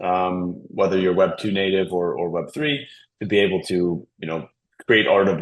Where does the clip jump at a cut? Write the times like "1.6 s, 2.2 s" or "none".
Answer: none